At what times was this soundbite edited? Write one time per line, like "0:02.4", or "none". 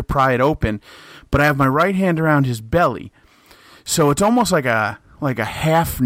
none